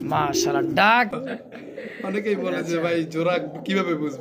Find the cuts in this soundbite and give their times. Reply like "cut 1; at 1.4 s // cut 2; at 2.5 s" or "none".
cut 1; at 1.1 s